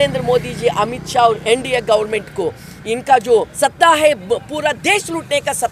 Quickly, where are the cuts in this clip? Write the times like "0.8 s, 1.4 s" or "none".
3.5 s